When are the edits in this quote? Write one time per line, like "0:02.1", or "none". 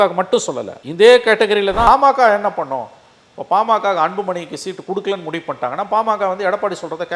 0:01.9